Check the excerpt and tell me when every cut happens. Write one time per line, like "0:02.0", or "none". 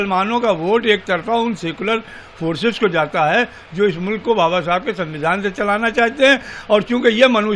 none

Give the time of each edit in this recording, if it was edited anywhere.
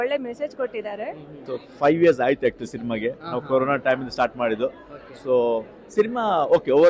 0:01.3

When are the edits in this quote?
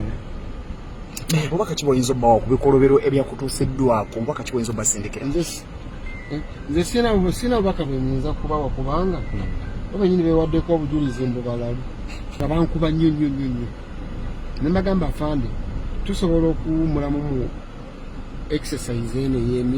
0:12.4

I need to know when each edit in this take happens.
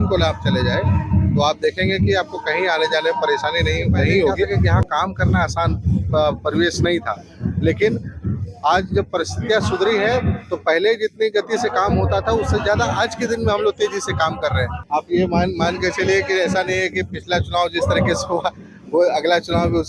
0:04.7
0:14.7

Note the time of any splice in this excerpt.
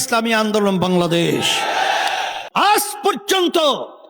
0:02.4

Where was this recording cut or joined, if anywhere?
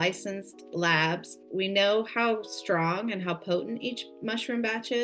0:01.4

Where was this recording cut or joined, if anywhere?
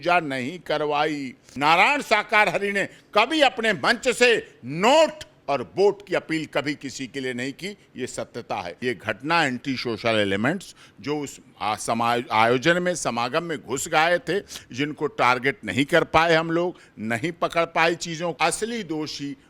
0:01.6
0:08.7
0:18.3

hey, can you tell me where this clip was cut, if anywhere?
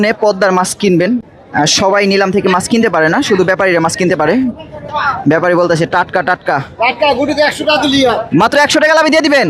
0:01.4
0:04.7

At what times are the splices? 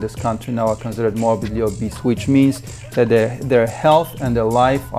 none

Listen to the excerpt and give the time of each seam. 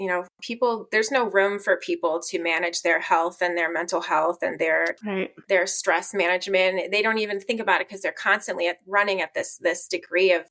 none

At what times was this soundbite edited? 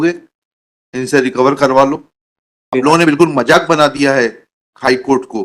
0:02.9

